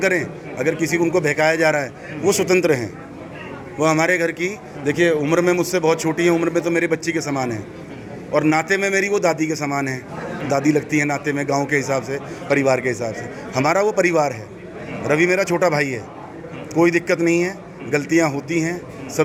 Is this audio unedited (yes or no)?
yes